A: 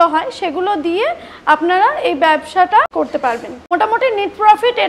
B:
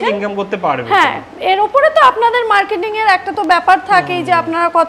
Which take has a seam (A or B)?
A